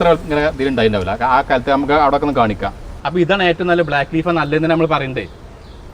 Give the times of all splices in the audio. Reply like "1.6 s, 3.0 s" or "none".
3.0 s